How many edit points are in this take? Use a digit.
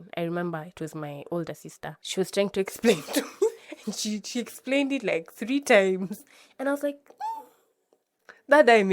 1